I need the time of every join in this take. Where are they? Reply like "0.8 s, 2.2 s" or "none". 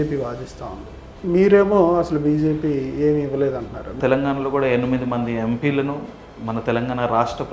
4.0 s

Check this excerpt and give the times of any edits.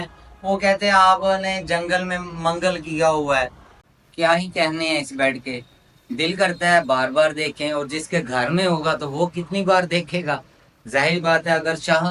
3.7 s

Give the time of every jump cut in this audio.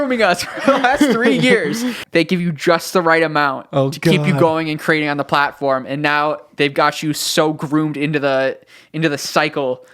2.0 s

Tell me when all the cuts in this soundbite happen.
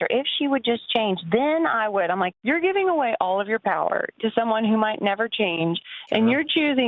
2.4 s

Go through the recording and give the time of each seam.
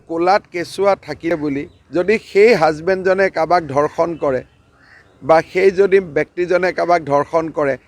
1.3 s

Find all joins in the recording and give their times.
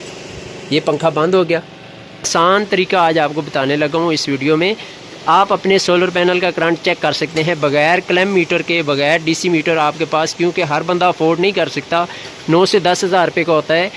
2.3 s

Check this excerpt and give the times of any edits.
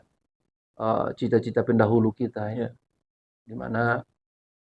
none

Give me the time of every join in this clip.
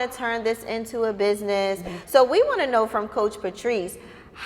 1.9 s

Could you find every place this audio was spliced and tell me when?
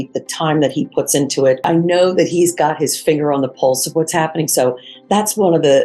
1.6 s

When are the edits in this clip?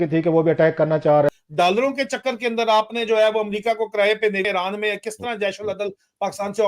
1.3 s, 4.5 s

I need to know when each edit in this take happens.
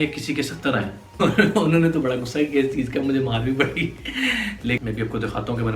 1.2 s, 4.8 s

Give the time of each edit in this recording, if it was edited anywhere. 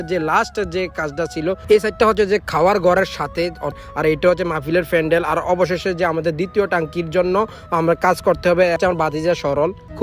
3.8 s, 8.8 s

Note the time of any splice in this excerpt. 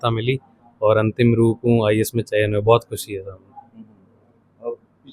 none

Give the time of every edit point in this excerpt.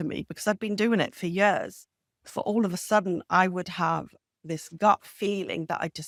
none

